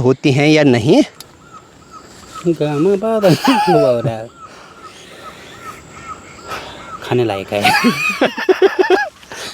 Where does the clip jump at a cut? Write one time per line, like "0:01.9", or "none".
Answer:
none